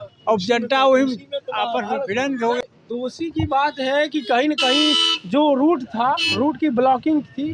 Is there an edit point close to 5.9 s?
no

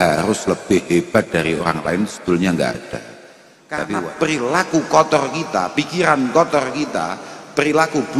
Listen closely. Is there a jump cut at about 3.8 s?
yes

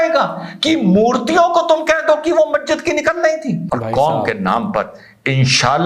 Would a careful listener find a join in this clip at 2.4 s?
no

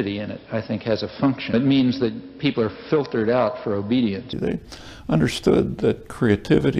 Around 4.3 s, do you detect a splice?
yes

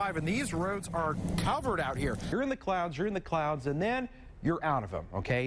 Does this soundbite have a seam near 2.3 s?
yes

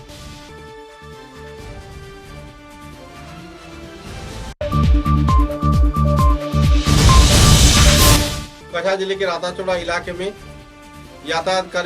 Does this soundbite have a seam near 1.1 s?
no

